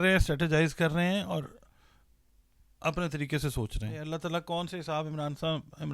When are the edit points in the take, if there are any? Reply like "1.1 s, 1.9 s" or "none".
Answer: 4.1 s